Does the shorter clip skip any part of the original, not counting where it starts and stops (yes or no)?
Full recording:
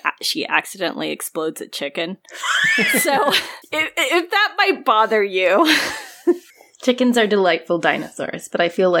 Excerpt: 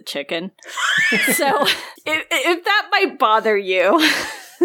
no